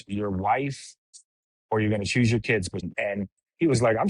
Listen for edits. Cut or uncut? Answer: cut